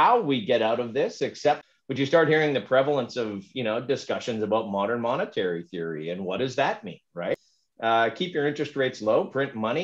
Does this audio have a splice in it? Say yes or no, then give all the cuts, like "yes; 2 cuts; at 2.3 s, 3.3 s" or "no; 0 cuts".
yes; 2 cuts; at 1.7 s, 7.3 s